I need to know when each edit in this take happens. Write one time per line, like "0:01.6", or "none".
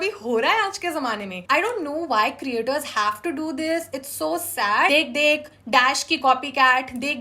0:01.3
0:04.9